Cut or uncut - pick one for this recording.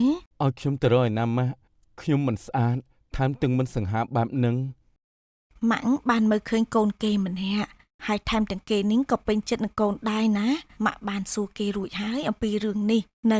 uncut